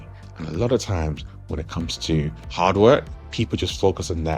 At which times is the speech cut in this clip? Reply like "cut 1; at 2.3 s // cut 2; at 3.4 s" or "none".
cut 1; at 2.4 s // cut 2; at 3.2 s

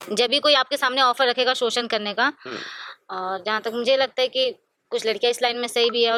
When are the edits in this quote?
none

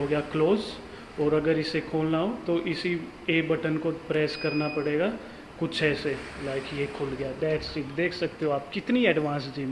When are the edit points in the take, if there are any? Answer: none

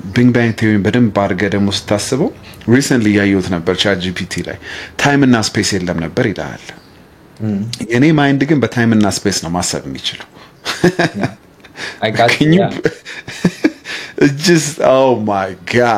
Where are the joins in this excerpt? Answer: none

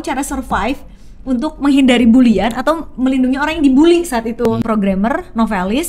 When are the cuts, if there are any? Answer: cut 1; at 4.4 s

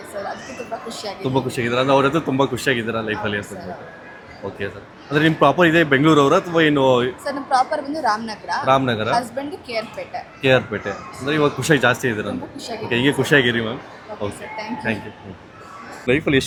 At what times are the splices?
none

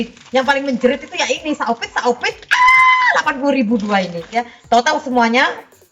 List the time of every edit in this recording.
cut 1; at 4.5 s

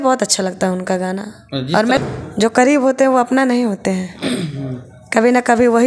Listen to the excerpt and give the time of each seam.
cut 1; at 2.0 s

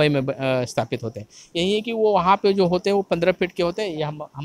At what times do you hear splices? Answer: none

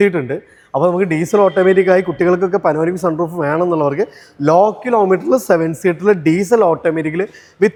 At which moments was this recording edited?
none

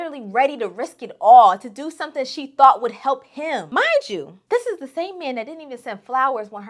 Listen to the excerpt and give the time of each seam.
none

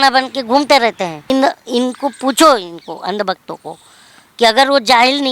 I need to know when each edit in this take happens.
cut 1; at 1.3 s

